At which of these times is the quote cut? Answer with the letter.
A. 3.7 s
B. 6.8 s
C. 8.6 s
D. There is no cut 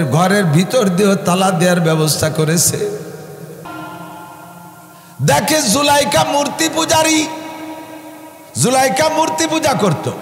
A